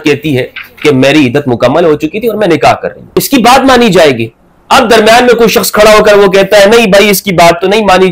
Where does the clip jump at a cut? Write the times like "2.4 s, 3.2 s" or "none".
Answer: 3.0 s